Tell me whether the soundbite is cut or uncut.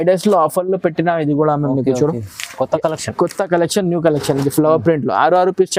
uncut